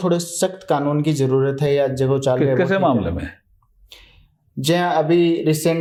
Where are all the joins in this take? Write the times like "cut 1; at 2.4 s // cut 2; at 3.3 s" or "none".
none